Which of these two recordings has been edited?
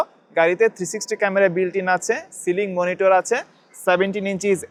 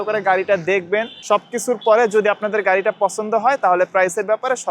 second; 1 cut; at 1.1 s

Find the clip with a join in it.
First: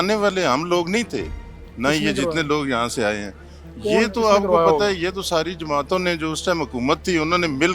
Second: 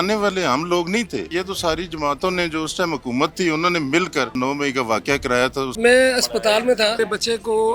second; 4 cuts; at 1.3 s, 4.4 s, 5.7 s, 7.0 s

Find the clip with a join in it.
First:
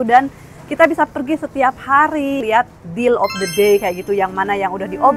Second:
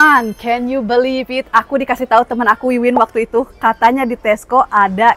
first; 1 cut; at 2.4 s

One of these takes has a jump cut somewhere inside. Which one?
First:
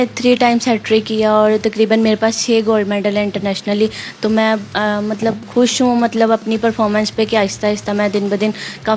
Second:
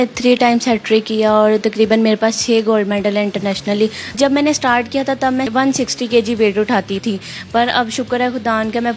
second; 3 cuts; at 4.2 s, 5.5 s, 7.0 s

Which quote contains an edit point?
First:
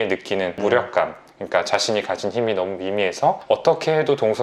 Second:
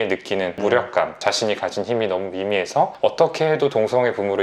second; 1 cut; at 1.2 s

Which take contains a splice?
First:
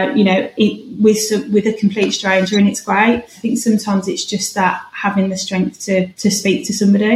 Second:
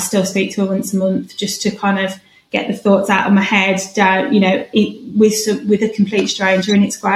first; 1 cut; at 6.1 s

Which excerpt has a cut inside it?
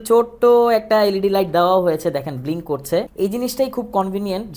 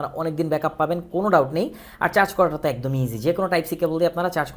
first; 1 cut; at 3.1 s

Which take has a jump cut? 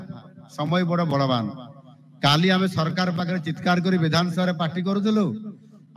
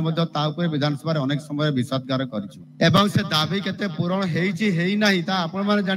second; 1 cut; at 2.6 s

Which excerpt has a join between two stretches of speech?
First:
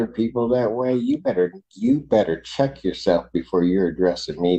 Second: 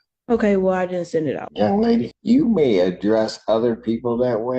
second; 2 cuts; at 1.5 s, 2.2 s

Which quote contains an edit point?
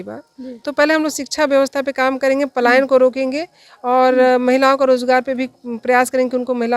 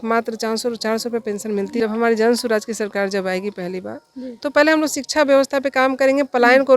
second; 1 cut; at 1.8 s

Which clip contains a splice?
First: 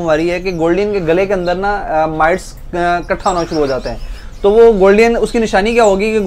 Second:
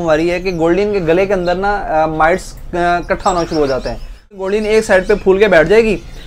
second; 1 cut; at 4.4 s

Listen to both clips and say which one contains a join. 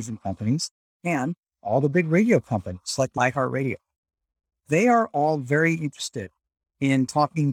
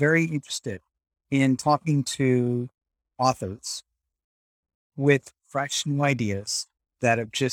first; 2 cuts; at 3.1 s, 4.5 s

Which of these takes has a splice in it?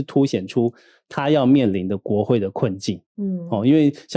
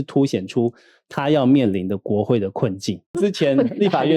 second; 1 cut; at 3.1 s

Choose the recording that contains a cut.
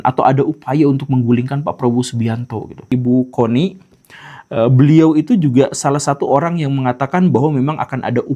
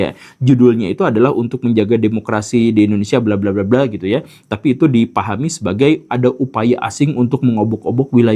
first; 1 cut; at 2.8 s

